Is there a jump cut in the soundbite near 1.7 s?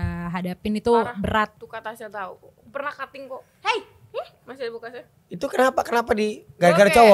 yes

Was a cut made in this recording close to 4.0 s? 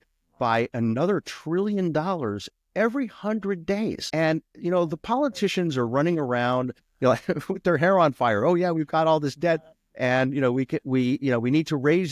yes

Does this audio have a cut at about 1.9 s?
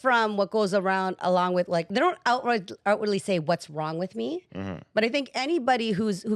yes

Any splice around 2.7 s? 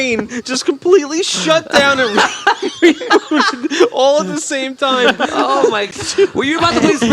no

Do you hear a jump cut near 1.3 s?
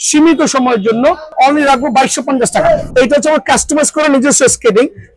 yes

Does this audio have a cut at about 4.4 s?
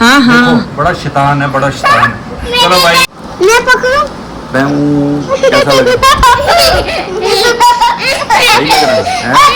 no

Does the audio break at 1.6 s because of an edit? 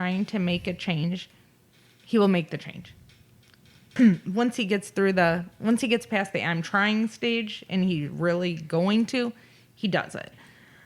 no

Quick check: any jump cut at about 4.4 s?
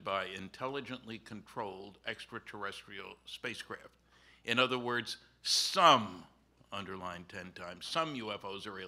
yes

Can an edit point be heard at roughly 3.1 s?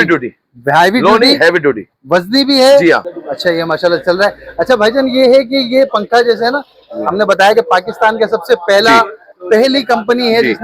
yes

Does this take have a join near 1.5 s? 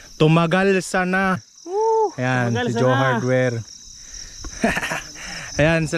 yes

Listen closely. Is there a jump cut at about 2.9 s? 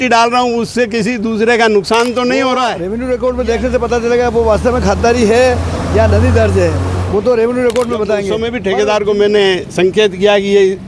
yes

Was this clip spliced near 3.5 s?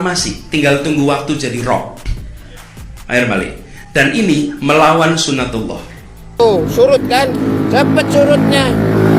no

